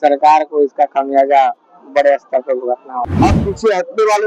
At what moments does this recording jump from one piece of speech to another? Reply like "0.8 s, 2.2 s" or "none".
3.1 s